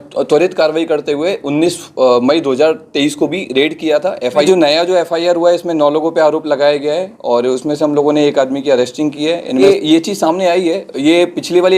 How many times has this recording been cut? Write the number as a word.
two